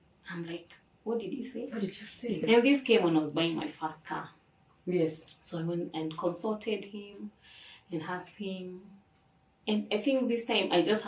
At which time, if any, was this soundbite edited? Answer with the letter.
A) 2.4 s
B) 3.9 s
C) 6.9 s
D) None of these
A